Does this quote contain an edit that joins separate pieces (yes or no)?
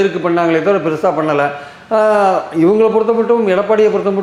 no